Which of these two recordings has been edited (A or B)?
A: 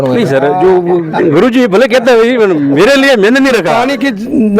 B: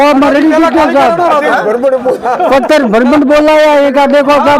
A